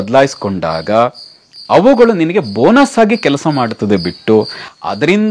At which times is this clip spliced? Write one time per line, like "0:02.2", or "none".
none